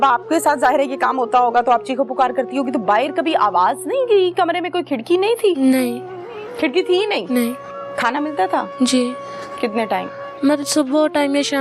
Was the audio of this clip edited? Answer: no; 0 cuts

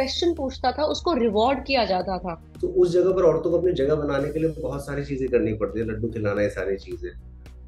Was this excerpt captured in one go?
no; 1 cut; at 2.4 s

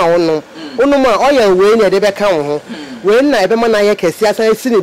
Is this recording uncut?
yes; 0 cuts

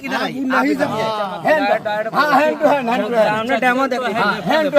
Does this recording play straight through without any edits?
no; 1 cut; at 0.9 s

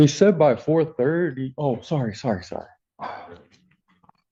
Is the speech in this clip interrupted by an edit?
no; 0 cuts

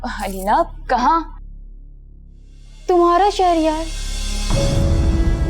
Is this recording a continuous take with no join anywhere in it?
yes; 0 cuts

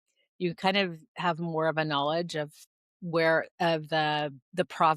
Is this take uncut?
yes; 0 cuts

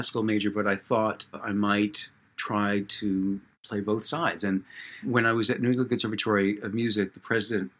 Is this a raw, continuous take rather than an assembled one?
no; 3 cuts; at 1.4 s, 3.5 s, 5.0 s

